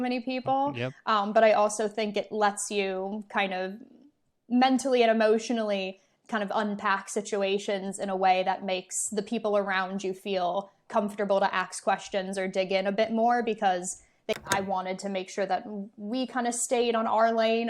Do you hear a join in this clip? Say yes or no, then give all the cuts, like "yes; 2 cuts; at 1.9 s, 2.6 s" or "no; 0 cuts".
yes; 1 cut; at 14.3 s